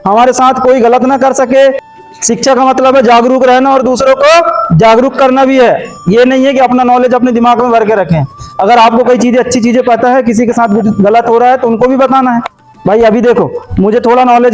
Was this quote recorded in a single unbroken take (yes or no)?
no